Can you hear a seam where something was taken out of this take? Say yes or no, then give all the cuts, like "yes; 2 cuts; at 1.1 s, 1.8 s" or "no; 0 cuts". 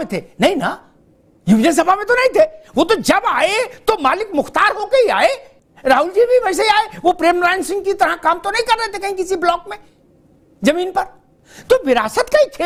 no; 0 cuts